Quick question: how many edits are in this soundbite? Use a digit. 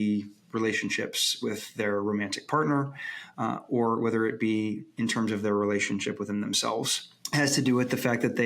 1